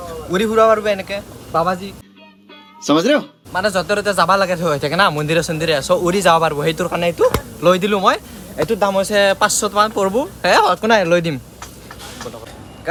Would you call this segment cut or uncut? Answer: uncut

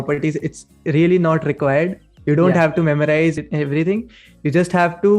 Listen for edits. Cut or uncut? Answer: cut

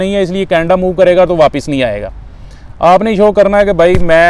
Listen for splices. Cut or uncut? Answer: uncut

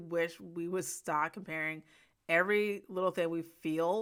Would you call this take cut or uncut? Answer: uncut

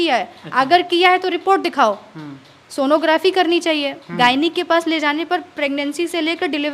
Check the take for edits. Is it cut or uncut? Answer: uncut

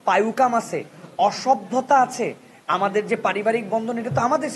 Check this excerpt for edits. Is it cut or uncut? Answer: uncut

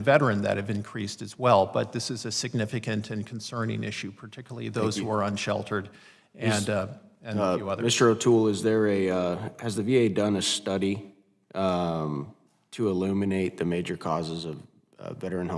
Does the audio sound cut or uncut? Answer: uncut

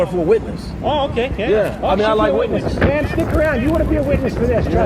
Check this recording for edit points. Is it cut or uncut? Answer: uncut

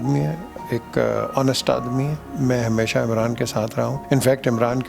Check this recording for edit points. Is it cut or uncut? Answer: cut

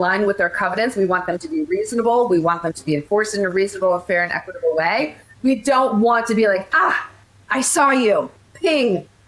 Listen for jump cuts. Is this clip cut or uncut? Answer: uncut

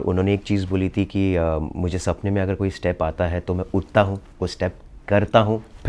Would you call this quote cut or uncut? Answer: uncut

